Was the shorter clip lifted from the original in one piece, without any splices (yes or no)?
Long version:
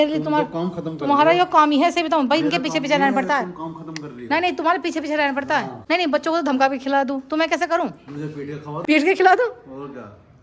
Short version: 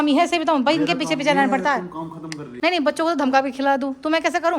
no